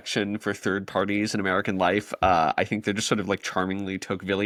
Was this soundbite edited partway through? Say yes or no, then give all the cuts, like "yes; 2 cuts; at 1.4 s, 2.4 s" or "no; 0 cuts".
no; 0 cuts